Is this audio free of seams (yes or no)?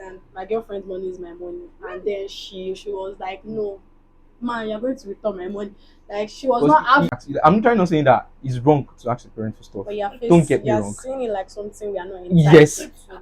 no